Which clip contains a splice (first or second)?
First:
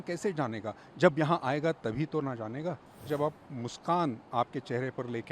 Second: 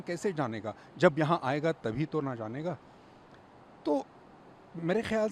first